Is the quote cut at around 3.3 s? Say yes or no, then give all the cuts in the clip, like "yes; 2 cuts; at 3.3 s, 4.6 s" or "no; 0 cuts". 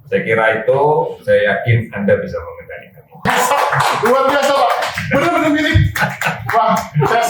yes; 1 cut; at 3.3 s